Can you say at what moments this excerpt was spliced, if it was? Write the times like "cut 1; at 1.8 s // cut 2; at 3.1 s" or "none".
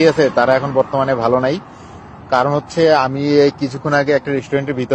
none